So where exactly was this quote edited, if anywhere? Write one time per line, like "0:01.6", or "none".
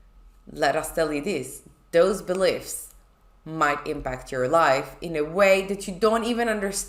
none